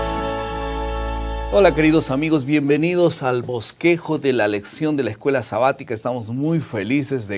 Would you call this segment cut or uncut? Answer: cut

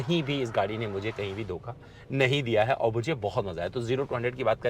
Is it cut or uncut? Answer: uncut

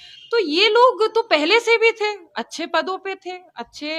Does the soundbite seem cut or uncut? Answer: uncut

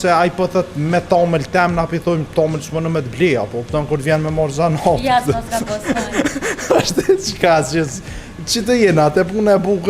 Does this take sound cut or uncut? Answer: uncut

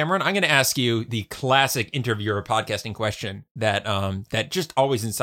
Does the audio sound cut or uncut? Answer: uncut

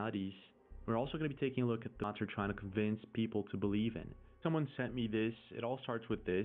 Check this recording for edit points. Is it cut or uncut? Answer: cut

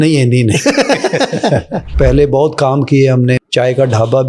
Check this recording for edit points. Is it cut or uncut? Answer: cut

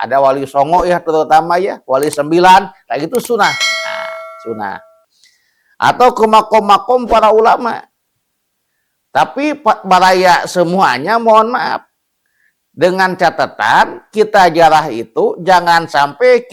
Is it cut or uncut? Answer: uncut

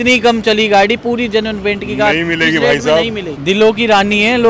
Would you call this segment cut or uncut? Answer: cut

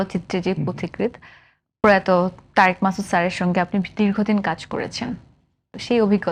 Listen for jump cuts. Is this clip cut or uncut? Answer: uncut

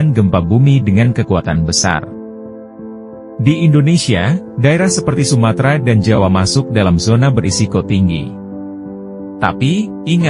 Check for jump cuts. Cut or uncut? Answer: uncut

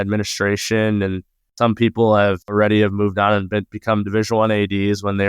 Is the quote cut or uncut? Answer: cut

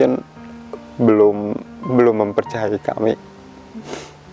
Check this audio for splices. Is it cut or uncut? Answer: uncut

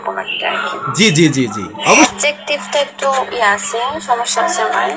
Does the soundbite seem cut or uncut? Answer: cut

